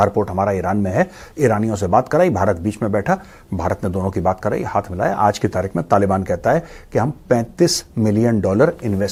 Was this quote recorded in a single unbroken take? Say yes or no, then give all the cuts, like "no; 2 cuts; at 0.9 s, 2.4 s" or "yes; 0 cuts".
yes; 0 cuts